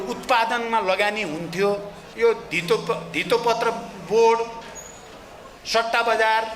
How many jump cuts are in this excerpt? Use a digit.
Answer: 1